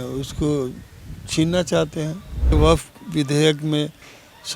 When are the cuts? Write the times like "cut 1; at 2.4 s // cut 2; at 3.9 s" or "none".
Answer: cut 1; at 2.5 s